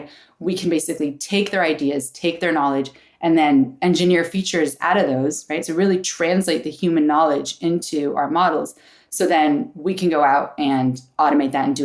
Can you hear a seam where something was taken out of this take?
no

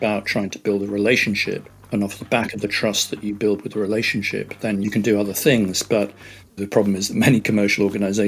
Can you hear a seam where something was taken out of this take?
yes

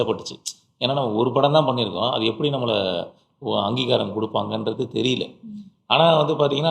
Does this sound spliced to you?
no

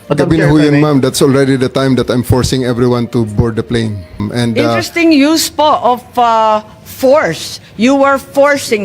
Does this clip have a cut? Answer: yes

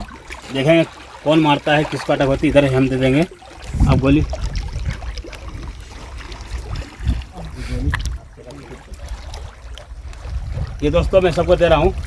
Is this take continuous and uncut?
no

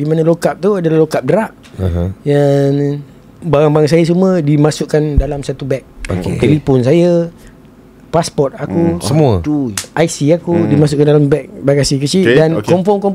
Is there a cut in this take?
no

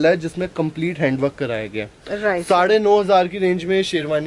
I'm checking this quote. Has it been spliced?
no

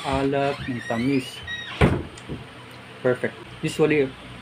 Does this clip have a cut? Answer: yes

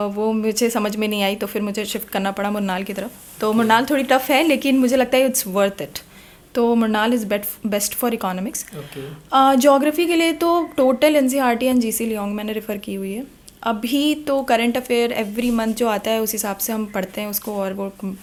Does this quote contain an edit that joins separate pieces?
no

